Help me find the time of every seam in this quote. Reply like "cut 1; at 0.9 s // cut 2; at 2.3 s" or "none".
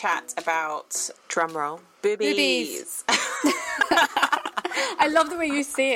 cut 1; at 1.0 s // cut 2; at 1.9 s